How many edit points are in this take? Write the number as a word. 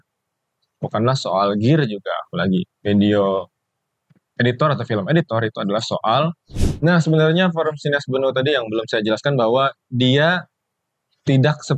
one